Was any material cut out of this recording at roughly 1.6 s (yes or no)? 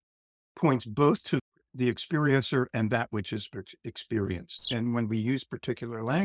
yes